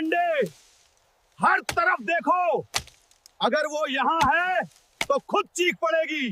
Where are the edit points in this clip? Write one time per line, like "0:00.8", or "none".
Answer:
none